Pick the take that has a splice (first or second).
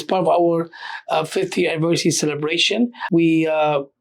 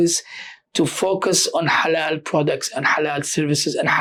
first